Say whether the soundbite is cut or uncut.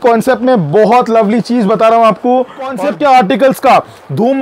cut